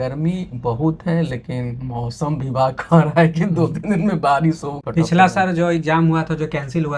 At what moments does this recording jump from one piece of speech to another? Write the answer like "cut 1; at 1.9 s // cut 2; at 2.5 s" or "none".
cut 1; at 4.7 s